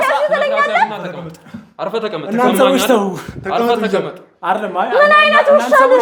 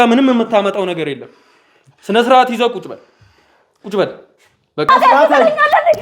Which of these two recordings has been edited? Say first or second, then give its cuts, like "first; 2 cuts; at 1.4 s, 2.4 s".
second; 1 cut; at 4.9 s